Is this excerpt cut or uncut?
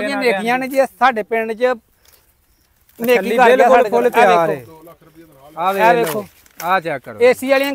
uncut